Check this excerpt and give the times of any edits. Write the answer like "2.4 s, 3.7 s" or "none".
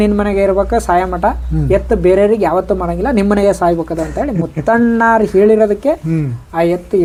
none